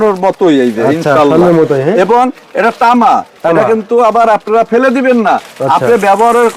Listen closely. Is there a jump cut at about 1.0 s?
no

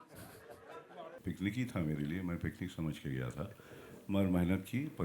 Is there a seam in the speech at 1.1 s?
yes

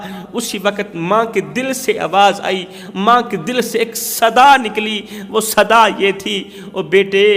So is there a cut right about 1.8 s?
no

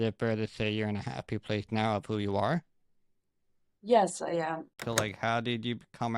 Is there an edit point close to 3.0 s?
no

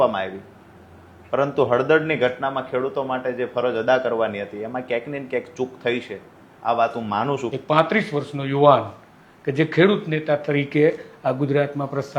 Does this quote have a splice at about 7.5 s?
yes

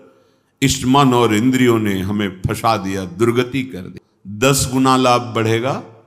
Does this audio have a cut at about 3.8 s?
yes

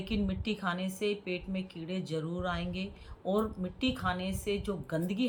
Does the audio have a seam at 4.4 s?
no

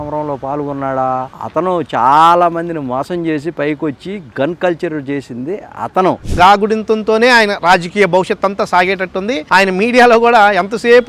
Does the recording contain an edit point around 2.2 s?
no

